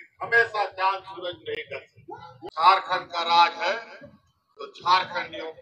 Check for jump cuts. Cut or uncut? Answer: cut